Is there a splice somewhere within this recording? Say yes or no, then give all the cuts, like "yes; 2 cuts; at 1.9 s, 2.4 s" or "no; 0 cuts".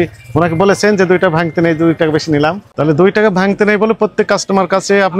yes; 1 cut; at 2.7 s